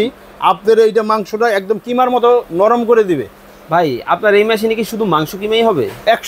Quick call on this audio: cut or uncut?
uncut